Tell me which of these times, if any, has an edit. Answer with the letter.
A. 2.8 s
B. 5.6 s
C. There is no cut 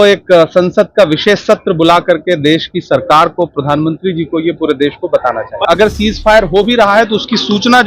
B